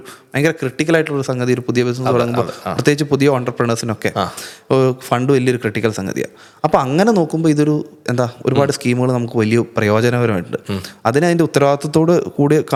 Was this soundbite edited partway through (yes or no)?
no